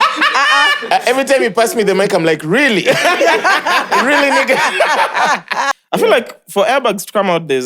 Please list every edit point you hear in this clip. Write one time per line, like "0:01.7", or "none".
0:05.7